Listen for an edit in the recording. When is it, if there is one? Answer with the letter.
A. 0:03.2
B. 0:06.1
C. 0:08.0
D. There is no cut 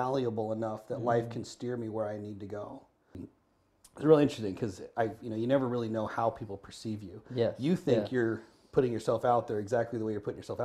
A